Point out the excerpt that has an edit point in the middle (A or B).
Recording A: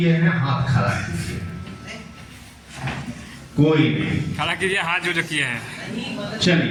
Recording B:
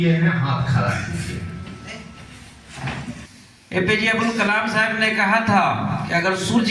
B